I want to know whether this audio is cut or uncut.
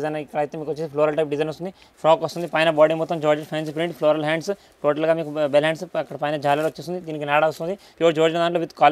cut